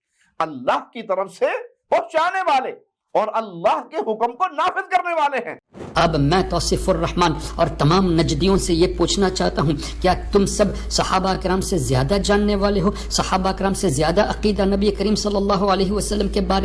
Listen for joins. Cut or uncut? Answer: cut